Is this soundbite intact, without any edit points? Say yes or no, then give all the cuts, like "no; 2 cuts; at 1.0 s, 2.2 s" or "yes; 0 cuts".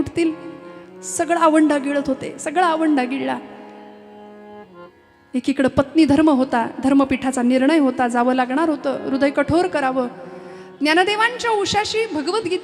yes; 0 cuts